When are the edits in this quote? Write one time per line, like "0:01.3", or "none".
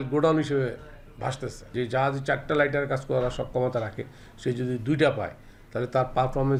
none

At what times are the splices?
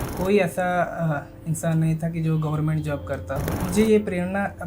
0:03.5

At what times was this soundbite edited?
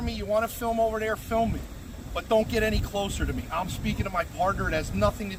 none

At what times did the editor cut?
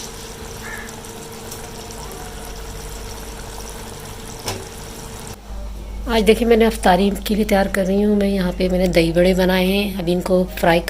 0:05.4

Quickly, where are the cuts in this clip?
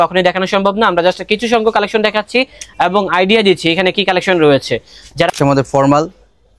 0:05.3

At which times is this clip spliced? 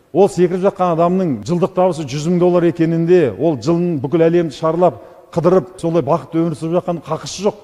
0:01.4
0:05.8

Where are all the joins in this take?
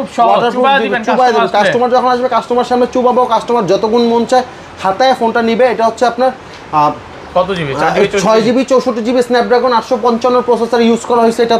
none

